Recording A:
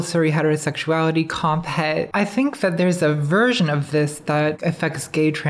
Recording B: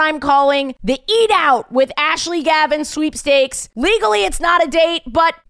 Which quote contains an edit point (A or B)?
A